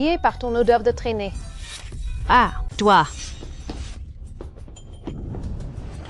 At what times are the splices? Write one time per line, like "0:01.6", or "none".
0:02.6